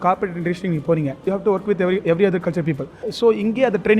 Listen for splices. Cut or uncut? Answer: cut